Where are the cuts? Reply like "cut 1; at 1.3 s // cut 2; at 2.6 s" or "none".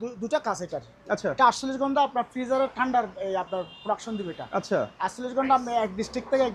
none